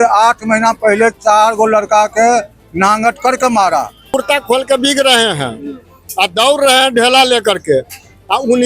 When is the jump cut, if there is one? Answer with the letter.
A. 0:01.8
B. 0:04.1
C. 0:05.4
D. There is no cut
B